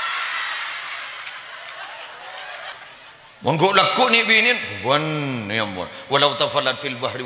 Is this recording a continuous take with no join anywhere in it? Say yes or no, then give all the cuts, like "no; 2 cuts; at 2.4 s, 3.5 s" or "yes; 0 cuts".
no; 1 cut; at 2.7 s